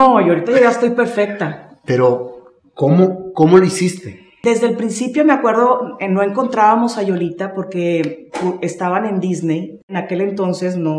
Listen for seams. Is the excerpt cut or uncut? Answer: cut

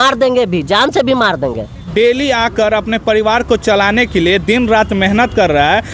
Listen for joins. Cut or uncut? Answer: cut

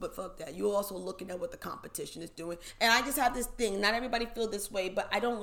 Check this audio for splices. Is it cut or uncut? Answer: cut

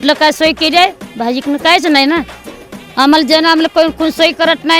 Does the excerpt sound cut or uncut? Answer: cut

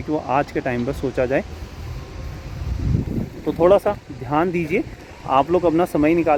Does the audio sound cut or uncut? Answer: uncut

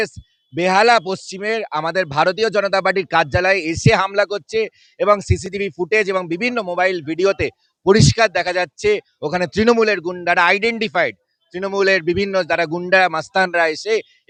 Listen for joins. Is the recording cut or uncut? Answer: uncut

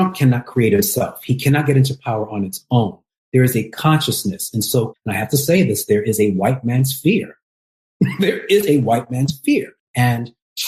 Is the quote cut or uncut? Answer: cut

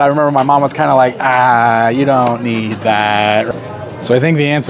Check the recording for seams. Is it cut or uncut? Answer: cut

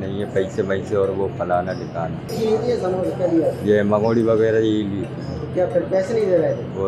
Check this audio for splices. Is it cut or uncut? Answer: cut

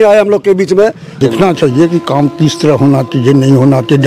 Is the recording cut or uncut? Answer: cut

